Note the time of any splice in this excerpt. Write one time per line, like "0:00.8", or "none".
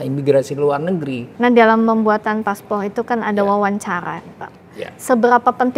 0:01.2